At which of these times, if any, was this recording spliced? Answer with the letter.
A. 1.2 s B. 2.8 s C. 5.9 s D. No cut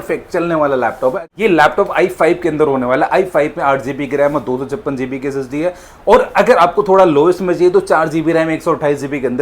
A